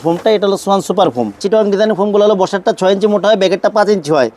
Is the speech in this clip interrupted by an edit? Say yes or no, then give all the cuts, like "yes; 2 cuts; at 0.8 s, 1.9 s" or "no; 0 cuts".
yes; 1 cut; at 1.4 s